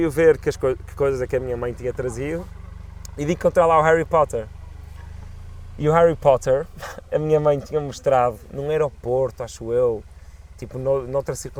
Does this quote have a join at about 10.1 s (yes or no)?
no